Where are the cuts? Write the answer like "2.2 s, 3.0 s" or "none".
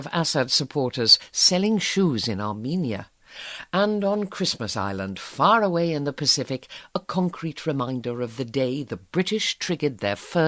8.0 s

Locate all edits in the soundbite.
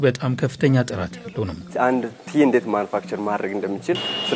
1.7 s

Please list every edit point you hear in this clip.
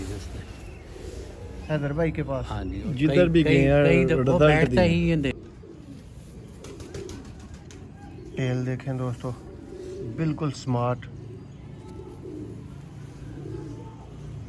5.3 s

